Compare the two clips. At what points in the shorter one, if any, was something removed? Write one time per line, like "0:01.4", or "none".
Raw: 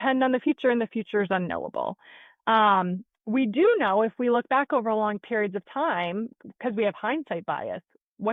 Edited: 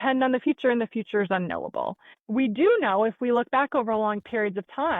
0:02.1